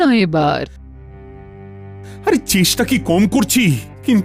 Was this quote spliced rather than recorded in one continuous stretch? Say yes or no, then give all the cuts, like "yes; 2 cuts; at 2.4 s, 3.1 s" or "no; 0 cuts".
no; 0 cuts